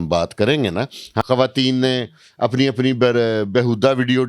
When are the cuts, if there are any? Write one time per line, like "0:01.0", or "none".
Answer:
0:01.2